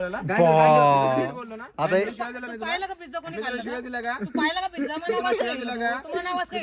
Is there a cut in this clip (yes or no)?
no